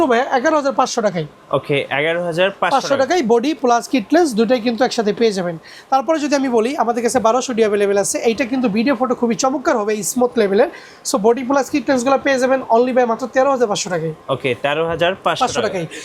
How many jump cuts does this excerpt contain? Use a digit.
0